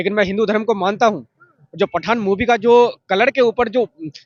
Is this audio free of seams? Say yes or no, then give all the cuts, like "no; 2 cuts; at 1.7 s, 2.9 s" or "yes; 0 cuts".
yes; 0 cuts